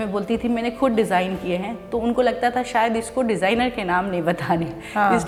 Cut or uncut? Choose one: uncut